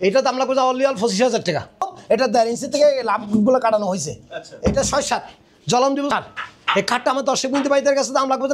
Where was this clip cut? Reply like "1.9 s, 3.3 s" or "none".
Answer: 1.9 s, 6.1 s